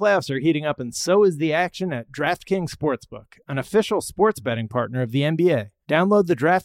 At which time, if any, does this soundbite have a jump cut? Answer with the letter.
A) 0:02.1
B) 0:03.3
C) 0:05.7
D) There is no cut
C